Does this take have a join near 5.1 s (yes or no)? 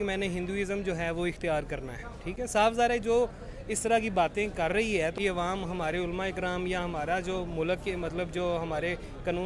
yes